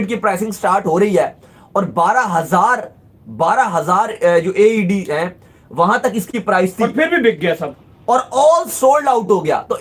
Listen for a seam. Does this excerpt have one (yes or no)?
no